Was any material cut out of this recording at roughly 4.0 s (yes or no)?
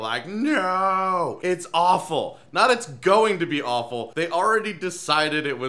yes